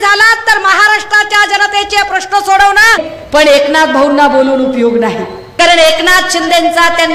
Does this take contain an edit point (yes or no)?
yes